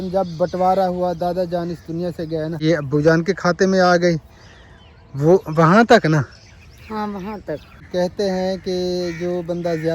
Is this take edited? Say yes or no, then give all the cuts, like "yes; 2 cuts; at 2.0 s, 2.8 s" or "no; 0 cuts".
yes; 2 cuts; at 2.5 s, 7.9 s